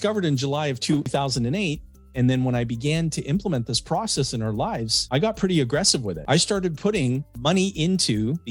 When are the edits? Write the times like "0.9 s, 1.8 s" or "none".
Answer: 1.1 s